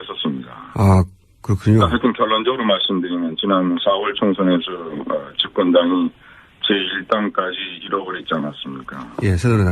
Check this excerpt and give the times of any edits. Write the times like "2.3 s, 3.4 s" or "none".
7.5 s